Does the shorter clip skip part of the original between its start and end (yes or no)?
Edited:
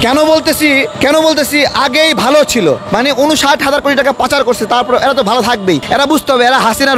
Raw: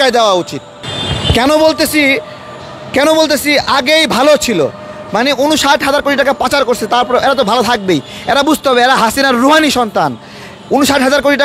yes